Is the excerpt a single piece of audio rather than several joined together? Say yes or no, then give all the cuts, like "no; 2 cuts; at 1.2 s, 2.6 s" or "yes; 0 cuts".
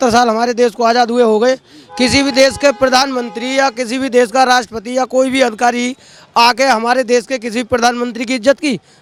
yes; 0 cuts